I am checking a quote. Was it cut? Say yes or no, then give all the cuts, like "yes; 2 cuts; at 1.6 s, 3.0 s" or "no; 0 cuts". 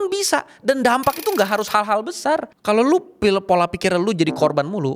yes; 1 cut; at 2.5 s